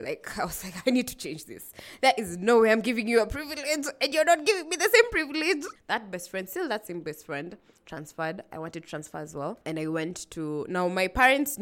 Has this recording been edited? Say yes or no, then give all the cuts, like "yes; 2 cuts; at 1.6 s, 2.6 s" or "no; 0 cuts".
no; 0 cuts